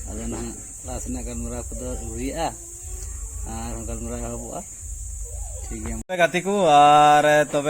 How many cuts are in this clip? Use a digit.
1